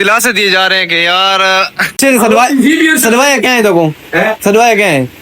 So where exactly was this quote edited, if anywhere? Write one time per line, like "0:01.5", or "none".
0:02.0